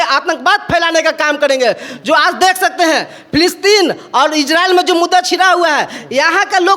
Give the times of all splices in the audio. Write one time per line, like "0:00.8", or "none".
none